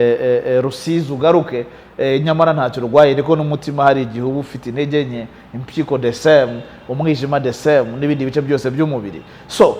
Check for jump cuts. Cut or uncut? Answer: uncut